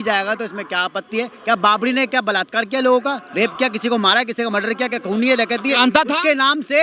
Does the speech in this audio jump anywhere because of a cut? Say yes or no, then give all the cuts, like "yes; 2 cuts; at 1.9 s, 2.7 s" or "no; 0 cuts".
no; 0 cuts